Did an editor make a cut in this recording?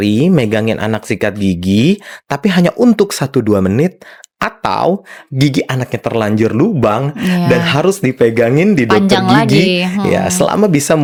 no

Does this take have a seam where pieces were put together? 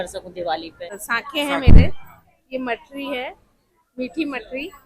yes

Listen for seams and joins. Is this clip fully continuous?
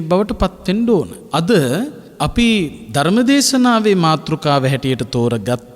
no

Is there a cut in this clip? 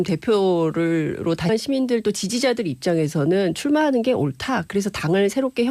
no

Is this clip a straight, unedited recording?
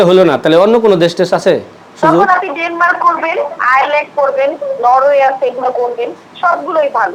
yes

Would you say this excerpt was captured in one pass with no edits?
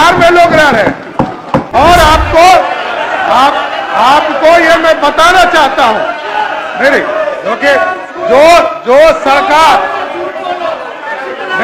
no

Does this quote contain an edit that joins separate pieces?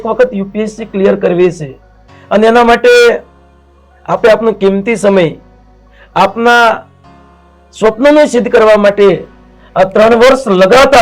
no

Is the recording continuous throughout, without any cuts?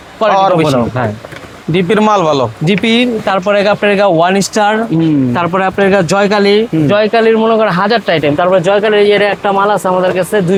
yes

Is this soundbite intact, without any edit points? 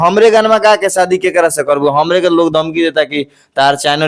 yes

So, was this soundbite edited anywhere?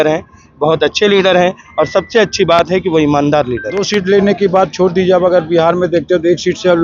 yes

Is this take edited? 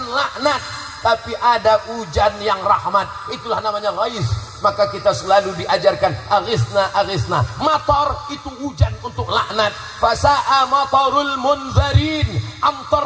no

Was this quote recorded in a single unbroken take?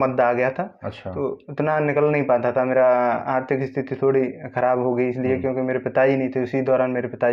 yes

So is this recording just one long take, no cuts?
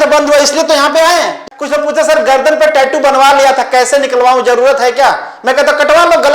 no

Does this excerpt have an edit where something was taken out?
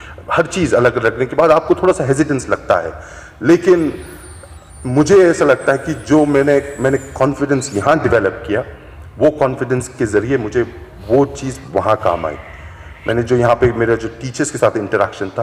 no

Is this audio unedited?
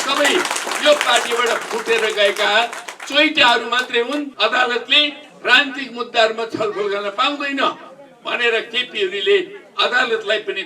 no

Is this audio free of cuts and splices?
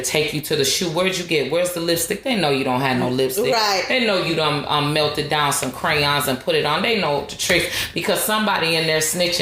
yes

